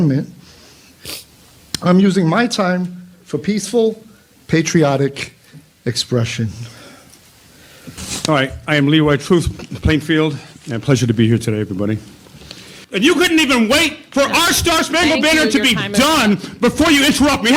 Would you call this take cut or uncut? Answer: cut